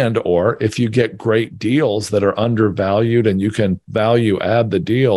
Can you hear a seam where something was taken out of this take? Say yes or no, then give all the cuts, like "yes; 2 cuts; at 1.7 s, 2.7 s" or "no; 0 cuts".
yes; 1 cut; at 3.8 s